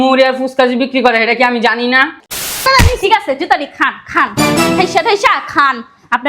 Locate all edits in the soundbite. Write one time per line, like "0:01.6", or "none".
0:02.5